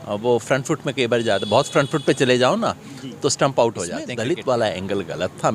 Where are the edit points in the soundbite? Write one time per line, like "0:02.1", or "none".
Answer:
0:04.1

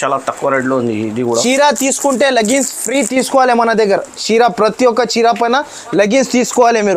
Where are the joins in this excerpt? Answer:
0:01.2

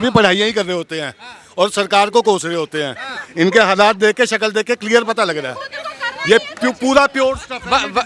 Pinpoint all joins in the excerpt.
none

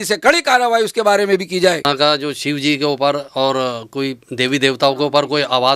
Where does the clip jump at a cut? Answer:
0:01.8

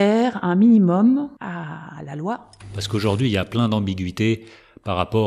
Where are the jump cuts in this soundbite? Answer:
0:01.4
0:02.8

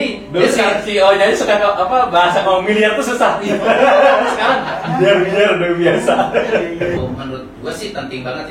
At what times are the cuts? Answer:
0:07.0

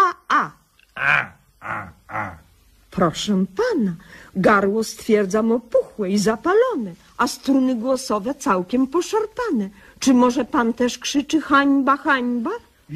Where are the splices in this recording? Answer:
0:07.0

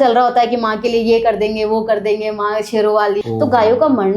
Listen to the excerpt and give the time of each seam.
0:03.2

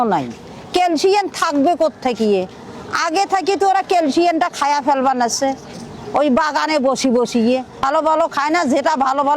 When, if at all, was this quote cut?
0:07.9

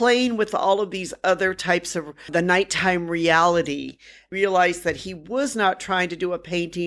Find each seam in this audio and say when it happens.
0:02.3
0:04.2

